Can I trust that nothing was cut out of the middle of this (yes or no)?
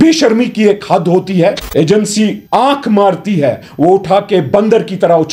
no